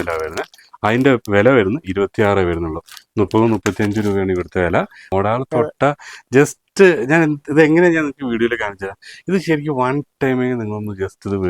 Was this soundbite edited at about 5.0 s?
yes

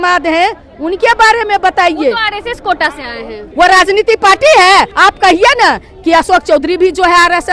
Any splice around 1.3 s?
no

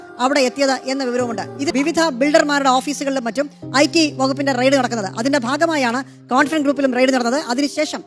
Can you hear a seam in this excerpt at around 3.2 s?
no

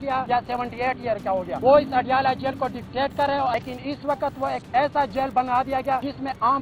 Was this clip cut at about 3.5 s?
yes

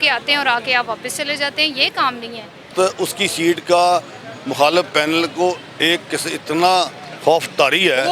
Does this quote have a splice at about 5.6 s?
no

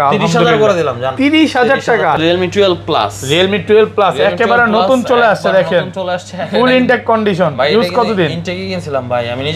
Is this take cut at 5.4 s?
no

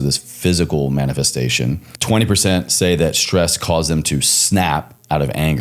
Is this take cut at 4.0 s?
no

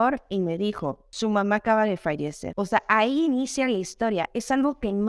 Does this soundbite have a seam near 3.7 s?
no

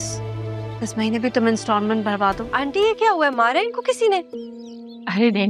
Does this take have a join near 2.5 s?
yes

